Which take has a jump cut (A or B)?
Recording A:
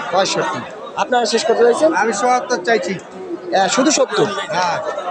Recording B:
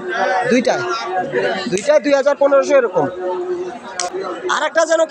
B